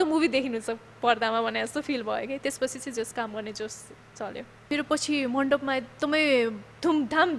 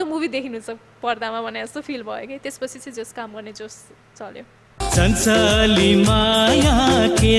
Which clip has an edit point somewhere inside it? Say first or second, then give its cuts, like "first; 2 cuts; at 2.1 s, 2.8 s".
first; 1 cut; at 4.5 s